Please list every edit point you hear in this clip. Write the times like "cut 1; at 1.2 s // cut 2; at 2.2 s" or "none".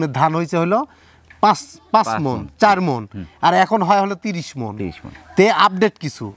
none